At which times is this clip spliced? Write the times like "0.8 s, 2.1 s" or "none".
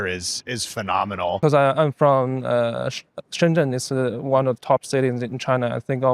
1.4 s